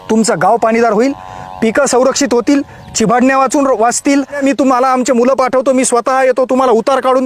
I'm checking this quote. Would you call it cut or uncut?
cut